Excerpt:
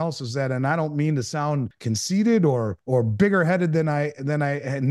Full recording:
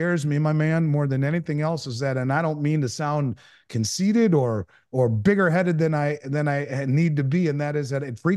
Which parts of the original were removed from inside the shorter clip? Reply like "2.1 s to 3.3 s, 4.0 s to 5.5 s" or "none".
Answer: 3.4 s to 3.6 s, 4.6 s to 4.8 s